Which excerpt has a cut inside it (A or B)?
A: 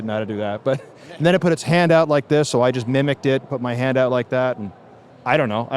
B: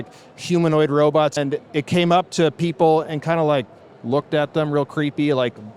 B